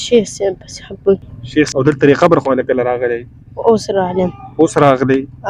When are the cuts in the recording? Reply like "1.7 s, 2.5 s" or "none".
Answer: 1.7 s